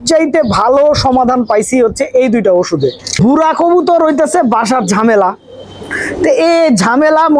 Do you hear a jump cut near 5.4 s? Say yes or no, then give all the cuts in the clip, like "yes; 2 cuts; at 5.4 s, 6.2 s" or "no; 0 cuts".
no; 1 cut; at 3.2 s